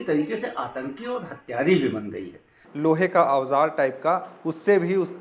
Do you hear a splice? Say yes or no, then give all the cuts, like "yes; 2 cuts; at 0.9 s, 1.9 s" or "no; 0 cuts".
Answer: yes; 1 cut; at 2.6 s